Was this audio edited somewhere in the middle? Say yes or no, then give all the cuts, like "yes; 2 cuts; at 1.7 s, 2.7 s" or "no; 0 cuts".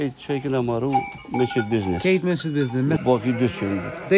yes; 1 cut; at 3.0 s